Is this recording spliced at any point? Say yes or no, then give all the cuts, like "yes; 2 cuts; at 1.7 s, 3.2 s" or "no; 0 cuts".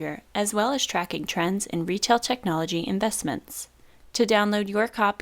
yes; 1 cut; at 3.9 s